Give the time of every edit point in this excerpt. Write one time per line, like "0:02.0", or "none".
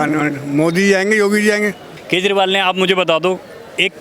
0:01.9